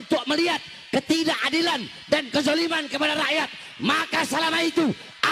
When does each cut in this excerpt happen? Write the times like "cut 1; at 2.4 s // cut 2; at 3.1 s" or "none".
none